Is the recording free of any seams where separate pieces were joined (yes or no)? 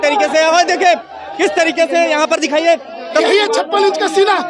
no